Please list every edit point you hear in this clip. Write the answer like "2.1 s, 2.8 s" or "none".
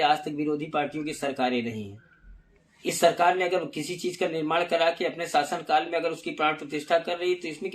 none